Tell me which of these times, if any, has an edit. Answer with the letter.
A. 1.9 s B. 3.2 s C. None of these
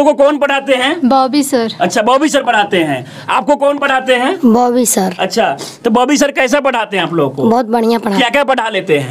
C